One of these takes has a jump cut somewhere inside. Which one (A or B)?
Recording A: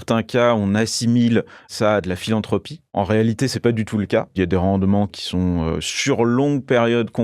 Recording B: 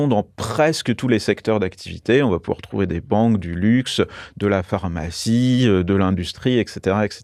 A